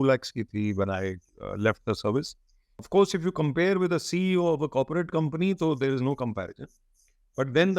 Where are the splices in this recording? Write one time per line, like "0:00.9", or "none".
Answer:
0:02.8